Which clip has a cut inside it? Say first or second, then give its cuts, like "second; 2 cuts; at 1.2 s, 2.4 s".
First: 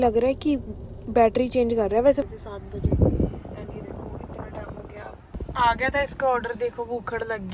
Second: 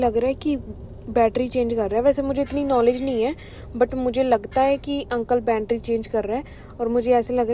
first; 2 cuts; at 2.2 s, 5.3 s